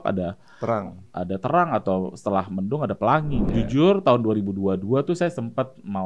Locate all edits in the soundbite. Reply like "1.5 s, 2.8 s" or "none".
3.5 s

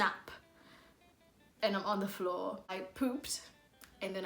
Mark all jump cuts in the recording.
2.7 s

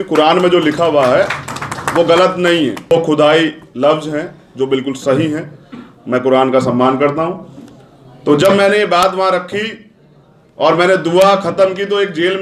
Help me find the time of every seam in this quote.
2.9 s

